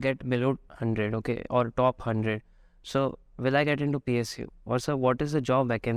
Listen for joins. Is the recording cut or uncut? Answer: uncut